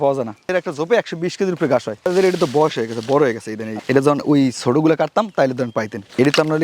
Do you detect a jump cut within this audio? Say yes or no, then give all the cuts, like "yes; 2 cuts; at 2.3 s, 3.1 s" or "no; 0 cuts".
yes; 1 cut; at 2.1 s